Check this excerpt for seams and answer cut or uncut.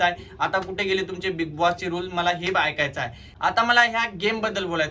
cut